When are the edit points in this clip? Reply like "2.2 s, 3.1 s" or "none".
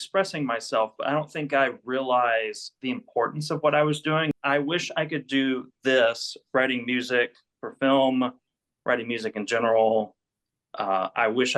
4.3 s

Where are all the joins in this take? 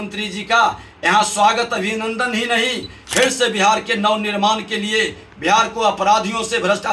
2.9 s

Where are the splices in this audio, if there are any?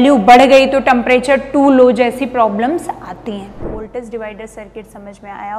3.8 s

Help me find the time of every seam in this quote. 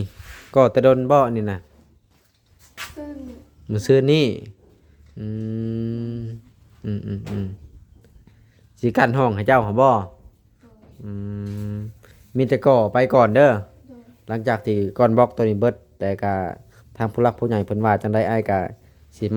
none

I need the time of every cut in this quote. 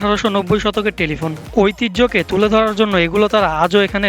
none

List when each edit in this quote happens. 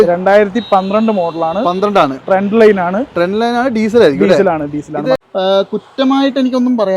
5.2 s

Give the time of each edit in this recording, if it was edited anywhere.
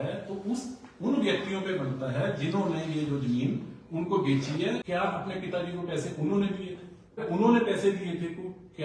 4.8 s, 7.2 s

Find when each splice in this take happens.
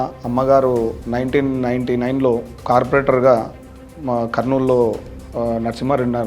1.0 s

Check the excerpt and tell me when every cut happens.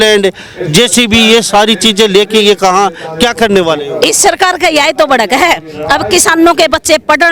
none

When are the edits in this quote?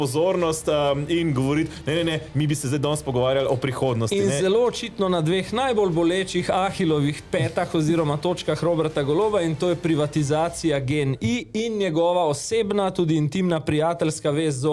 none

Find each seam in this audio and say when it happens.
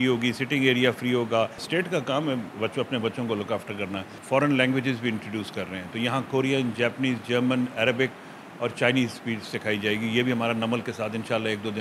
1.6 s, 4.1 s

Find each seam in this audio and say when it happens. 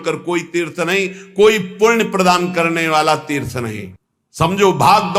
none

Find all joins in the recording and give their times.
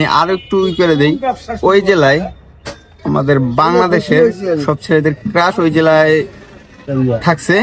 none

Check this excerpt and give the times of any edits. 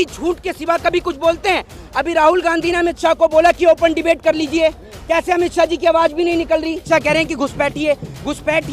6.8 s

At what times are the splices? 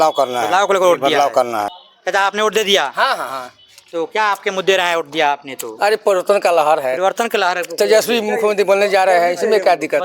1.8 s

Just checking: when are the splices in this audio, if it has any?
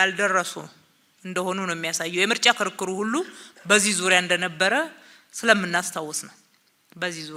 none

